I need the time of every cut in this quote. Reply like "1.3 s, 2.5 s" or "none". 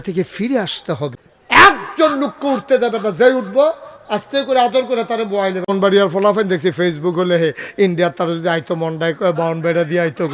1.3 s, 5.7 s